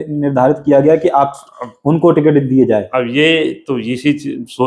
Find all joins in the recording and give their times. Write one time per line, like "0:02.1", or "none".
none